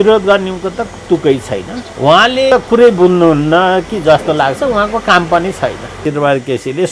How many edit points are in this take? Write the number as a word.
three